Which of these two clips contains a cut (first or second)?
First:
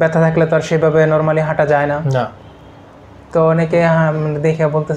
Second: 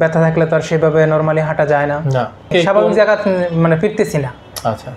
second